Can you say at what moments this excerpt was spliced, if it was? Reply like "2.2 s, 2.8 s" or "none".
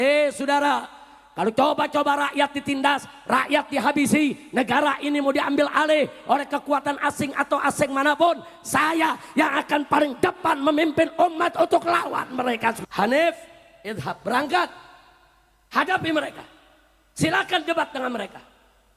12.8 s